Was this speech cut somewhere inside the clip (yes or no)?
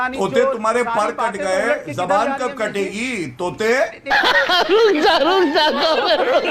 no